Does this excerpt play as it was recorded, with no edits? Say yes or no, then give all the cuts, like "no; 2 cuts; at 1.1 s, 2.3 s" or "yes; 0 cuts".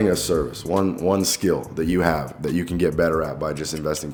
yes; 0 cuts